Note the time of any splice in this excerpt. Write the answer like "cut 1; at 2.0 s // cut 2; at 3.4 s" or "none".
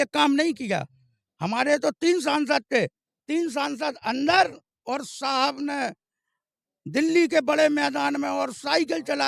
none